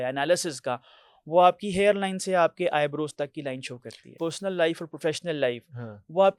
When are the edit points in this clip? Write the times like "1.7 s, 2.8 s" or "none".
4.2 s